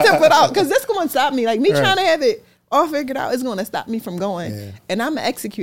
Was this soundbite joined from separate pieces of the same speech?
no; 0 cuts

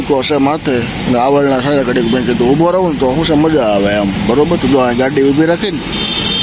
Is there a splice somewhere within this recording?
no; 0 cuts

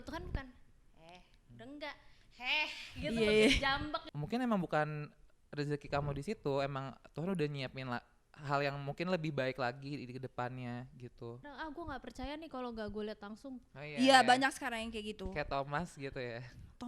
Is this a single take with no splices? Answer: no; 2 cuts; at 4.0 s, 11.5 s

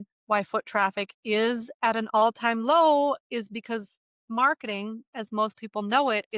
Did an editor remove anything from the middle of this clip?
no; 0 cuts

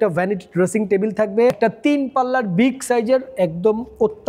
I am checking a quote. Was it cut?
yes; 1 cut; at 1.5 s

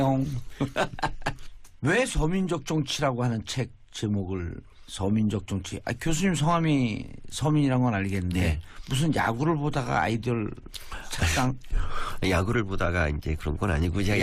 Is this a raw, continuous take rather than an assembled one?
yes; 0 cuts

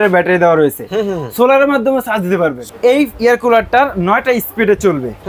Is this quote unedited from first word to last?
no; 1 cut; at 2.6 s

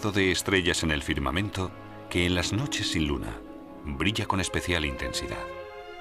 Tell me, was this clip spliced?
yes; 1 cut; at 4.4 s

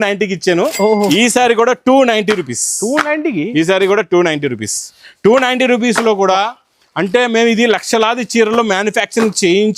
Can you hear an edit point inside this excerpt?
no; 0 cuts

